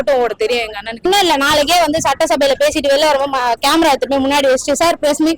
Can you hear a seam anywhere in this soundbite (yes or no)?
yes